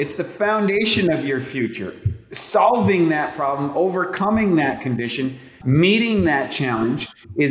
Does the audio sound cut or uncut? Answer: cut